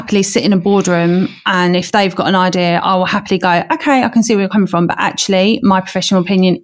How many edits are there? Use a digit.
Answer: 0